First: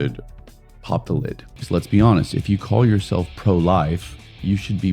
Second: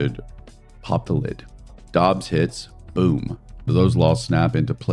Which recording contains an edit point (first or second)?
first